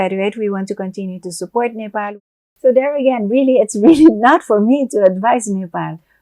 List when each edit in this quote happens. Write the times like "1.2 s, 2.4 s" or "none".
2.2 s